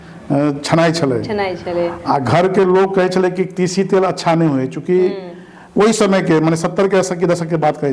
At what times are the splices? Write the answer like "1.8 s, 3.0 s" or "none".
none